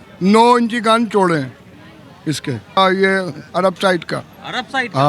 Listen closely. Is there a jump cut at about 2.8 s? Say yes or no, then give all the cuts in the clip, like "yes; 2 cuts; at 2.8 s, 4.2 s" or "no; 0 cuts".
yes; 1 cut; at 2.8 s